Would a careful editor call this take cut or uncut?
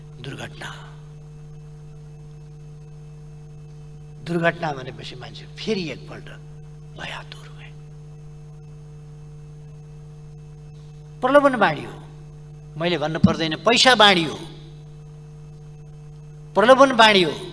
uncut